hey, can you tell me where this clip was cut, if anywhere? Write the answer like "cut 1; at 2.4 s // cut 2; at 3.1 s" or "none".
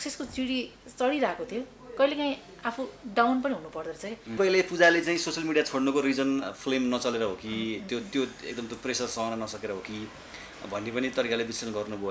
cut 1; at 4.4 s

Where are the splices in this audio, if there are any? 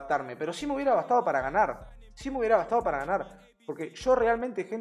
none

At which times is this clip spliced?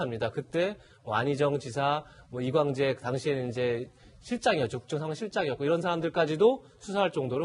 cut 1; at 4.8 s

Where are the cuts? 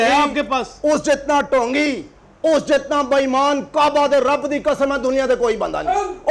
none

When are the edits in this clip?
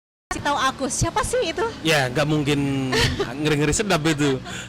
none

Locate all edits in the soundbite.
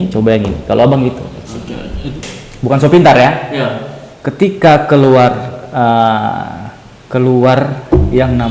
cut 1; at 2.3 s

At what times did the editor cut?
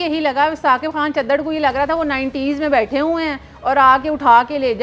none

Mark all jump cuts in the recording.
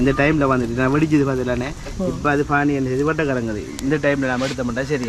none

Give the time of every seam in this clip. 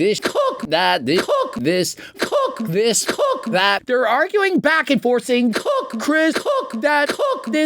cut 1; at 3.8 s

